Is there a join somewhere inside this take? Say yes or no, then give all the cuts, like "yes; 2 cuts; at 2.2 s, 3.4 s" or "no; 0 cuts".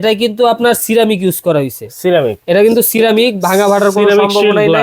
no; 0 cuts